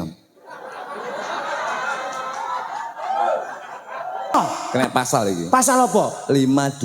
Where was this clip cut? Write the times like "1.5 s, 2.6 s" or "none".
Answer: 4.3 s